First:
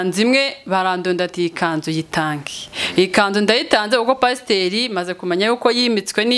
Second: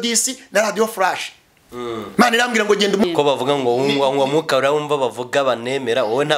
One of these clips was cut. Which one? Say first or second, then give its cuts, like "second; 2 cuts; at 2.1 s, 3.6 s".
second; 1 cut; at 3.0 s